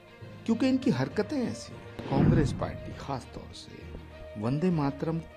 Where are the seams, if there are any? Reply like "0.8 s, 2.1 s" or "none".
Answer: 2.0 s